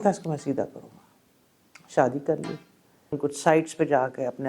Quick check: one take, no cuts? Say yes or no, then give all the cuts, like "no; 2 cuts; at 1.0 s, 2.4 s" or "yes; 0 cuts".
no; 1 cut; at 3.2 s